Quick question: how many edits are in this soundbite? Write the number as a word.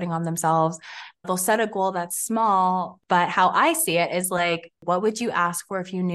three